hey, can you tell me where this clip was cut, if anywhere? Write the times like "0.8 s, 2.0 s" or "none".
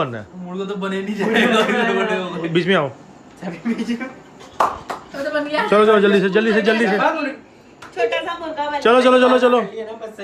none